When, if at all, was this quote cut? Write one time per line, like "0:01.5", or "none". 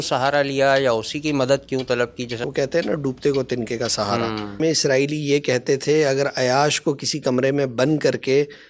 0:02.5
0:04.6